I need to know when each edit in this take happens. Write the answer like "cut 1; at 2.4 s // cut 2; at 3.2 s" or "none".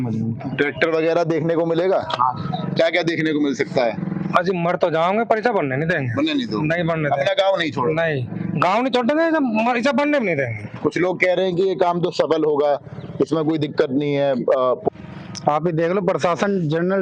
cut 1; at 14.9 s